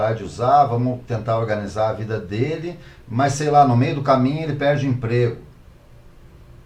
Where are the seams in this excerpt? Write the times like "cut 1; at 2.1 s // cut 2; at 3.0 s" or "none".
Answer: none